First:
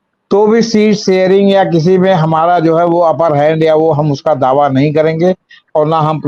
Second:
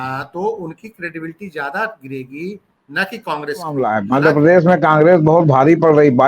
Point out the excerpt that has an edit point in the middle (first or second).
second